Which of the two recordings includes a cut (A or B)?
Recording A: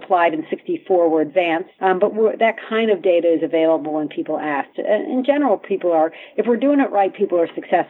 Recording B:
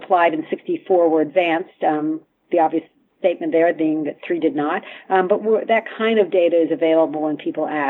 A